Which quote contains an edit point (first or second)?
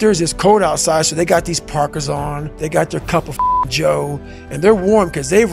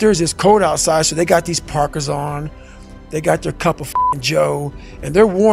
first